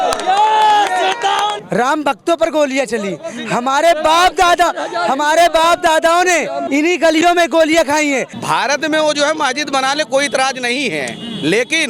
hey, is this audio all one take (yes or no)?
no